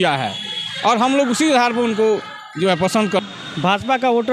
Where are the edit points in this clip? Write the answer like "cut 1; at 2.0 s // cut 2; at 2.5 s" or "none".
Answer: cut 1; at 3.2 s

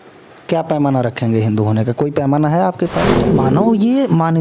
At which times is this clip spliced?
cut 1; at 3.3 s

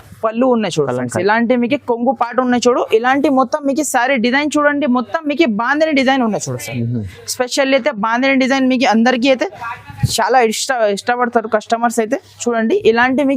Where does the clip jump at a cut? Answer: none

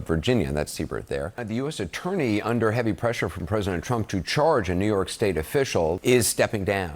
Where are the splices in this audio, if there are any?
cut 1; at 1.4 s // cut 2; at 6.0 s

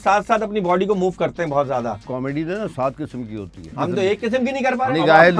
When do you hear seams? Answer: cut 1; at 2.1 s // cut 2; at 3.7 s

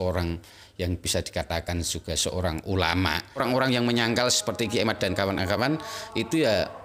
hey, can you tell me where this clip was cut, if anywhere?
cut 1; at 3.4 s

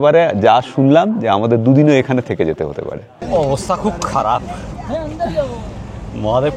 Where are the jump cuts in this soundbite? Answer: cut 1; at 3.1 s

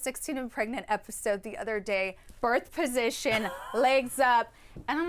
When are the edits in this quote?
cut 1; at 2.2 s

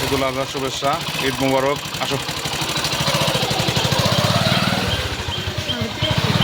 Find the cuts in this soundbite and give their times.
none

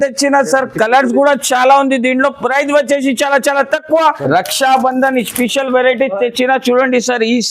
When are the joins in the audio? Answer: cut 1; at 4.2 s

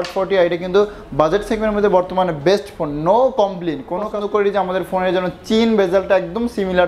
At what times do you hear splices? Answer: cut 1; at 4.1 s

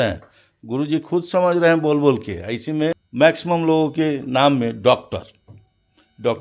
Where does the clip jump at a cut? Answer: cut 1; at 3.0 s

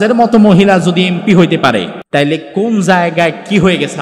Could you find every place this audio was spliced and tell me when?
cut 1; at 2.0 s

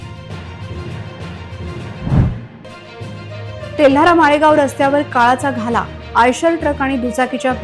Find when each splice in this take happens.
cut 1; at 2.0 s

